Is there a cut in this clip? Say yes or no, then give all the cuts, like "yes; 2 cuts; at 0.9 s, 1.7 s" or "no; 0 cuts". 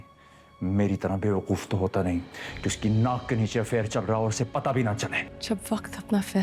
yes; 1 cut; at 5.3 s